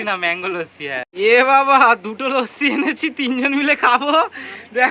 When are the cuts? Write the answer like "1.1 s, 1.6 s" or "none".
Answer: 1.0 s